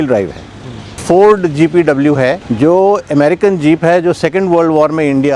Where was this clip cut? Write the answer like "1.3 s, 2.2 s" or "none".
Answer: 0.8 s, 2.5 s